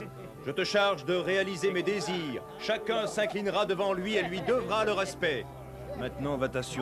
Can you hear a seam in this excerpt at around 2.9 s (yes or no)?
yes